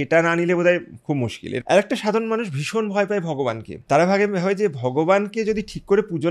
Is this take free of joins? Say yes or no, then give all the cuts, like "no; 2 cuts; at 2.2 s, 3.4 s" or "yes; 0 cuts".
no; 2 cuts; at 1.4 s, 3.7 s